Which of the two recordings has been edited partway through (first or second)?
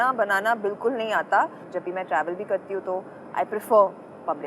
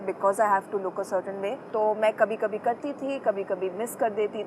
first